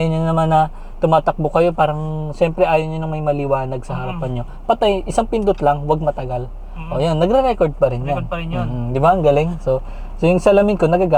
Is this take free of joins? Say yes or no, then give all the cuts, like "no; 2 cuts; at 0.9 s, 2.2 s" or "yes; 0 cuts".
yes; 0 cuts